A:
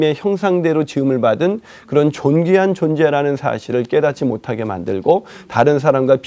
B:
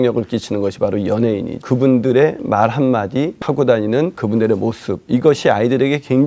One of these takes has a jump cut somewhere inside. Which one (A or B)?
B